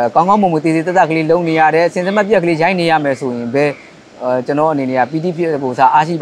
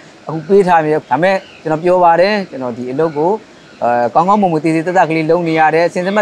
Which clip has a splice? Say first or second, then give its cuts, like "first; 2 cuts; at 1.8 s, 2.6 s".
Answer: second; 1 cut; at 1.0 s